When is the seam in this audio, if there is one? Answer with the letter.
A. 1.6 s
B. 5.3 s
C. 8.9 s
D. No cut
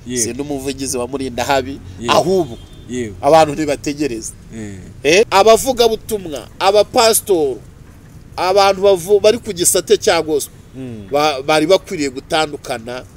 B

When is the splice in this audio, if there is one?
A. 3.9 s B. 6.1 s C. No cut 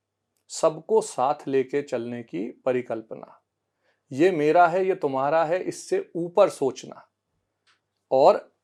C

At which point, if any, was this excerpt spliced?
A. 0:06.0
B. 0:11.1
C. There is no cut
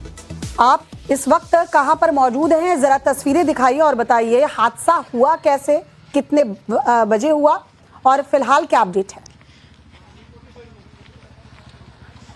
A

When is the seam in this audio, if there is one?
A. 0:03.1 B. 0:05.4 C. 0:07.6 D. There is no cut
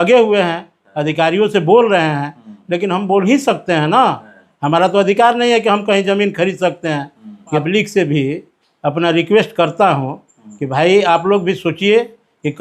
C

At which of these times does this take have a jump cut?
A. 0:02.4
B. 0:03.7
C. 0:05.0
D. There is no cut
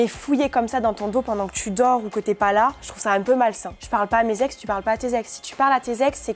B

